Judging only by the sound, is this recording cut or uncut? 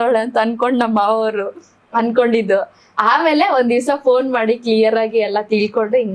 uncut